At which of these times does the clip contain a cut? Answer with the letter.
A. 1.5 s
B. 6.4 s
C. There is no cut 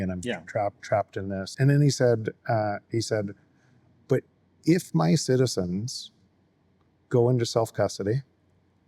A